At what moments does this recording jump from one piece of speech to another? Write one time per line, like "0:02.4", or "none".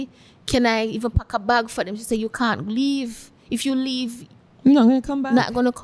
none